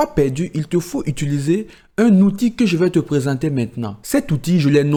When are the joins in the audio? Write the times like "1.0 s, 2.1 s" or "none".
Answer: none